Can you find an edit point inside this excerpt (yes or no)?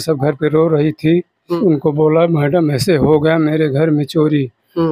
yes